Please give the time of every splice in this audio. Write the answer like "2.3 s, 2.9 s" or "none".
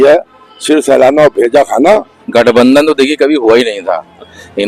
2.2 s